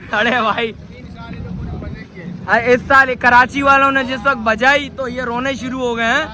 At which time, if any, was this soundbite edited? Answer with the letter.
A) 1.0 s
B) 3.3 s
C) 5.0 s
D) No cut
D